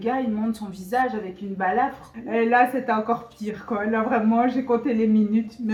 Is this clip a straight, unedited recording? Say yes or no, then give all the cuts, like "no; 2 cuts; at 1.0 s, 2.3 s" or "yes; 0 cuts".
yes; 0 cuts